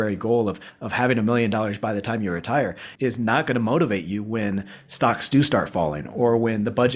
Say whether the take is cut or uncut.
uncut